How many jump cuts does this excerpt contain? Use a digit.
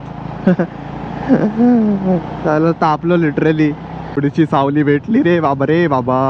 1